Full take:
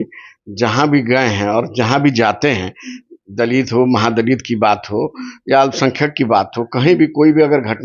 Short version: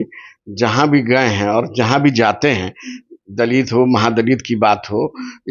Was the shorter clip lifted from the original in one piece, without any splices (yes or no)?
yes